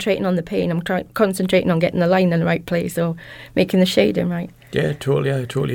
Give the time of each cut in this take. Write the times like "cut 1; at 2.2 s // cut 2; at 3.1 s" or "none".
cut 1; at 4.5 s